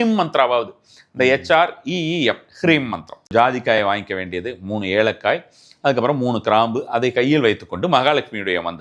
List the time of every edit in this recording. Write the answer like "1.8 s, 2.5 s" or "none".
3.3 s